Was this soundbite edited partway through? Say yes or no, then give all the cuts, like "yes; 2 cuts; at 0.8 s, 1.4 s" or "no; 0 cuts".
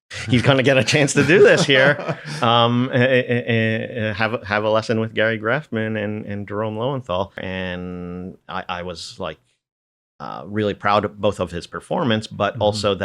yes; 1 cut; at 7.4 s